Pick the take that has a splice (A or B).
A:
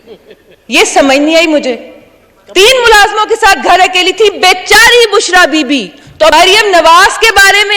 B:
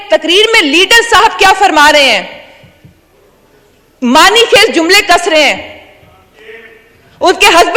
A